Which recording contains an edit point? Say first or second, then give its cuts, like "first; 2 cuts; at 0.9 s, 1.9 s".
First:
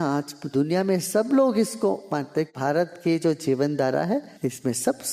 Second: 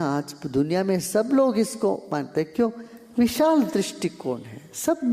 first; 2 cuts; at 2.5 s, 4.3 s